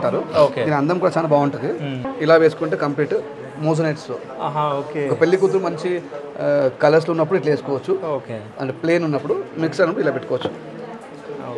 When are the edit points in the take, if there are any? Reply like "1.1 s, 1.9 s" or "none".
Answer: 2.0 s

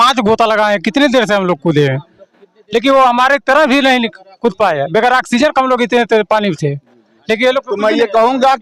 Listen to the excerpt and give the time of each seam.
none

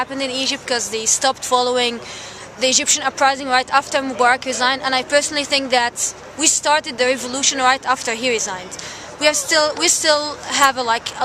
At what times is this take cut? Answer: 1.7 s

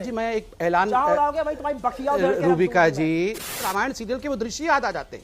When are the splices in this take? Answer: 3.5 s

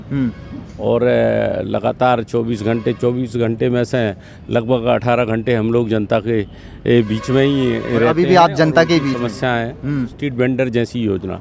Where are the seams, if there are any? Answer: 10.2 s

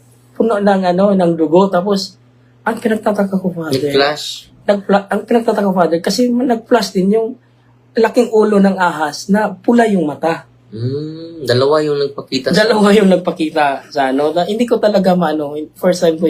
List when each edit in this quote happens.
none

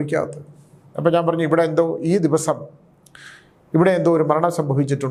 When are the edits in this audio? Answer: none

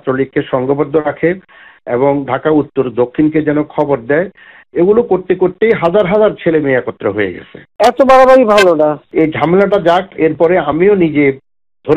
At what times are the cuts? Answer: 7.7 s, 9.0 s

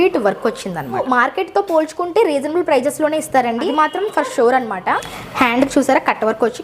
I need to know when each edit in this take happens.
1.0 s, 3.6 s, 5.2 s

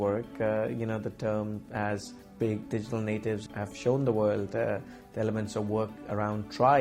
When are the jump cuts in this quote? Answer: none

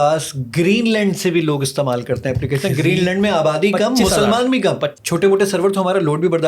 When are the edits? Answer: 4.9 s

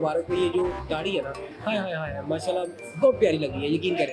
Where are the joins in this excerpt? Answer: none

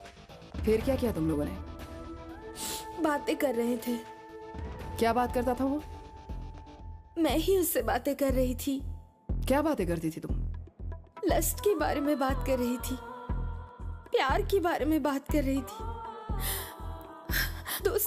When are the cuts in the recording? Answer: none

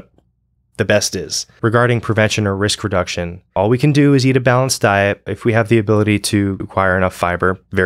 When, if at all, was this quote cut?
1.5 s, 3.5 s, 5.3 s, 6.6 s

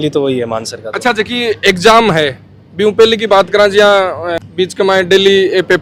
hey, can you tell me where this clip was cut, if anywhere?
none

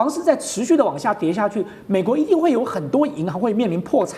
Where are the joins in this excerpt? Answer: none

